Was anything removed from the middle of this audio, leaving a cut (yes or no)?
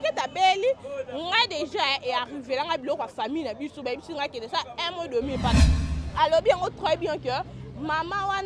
yes